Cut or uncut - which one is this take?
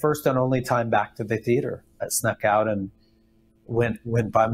cut